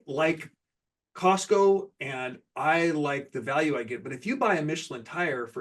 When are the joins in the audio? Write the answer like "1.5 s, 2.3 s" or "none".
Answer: none

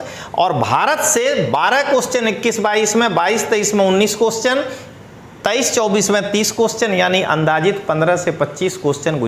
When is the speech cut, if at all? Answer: none

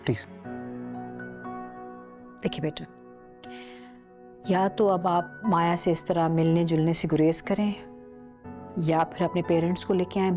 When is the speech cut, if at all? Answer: none

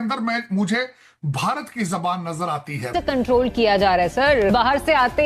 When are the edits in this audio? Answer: 2.9 s

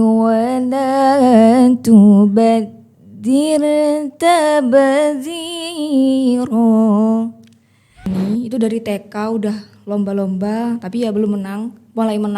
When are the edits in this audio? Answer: 8.1 s

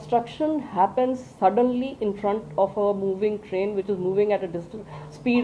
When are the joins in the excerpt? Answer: none

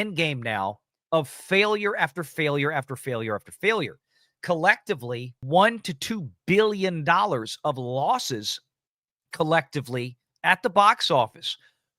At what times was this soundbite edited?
5.4 s

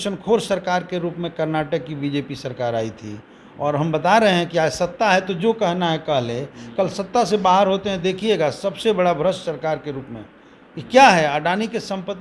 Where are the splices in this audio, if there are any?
none

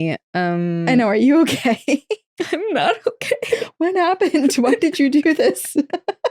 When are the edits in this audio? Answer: none

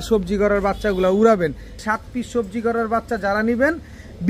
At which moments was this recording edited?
1.8 s

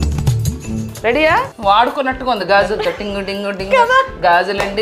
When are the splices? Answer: 1.5 s

